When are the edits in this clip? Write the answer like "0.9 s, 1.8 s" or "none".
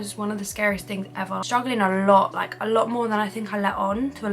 1.4 s